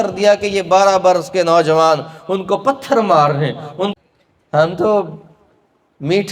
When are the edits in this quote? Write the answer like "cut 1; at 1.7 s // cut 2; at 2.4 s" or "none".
cut 1; at 3.9 s